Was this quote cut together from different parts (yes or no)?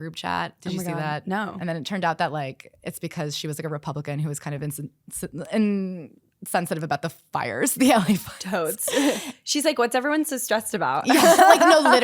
yes